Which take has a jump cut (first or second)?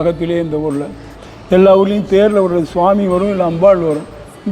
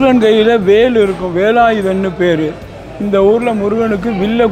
first